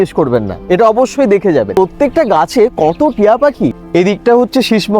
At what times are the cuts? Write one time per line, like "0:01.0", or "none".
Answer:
0:01.7
0:03.8